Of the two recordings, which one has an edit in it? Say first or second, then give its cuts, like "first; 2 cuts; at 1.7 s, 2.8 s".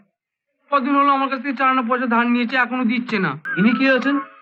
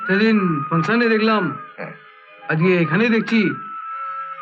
first; 1 cut; at 3.4 s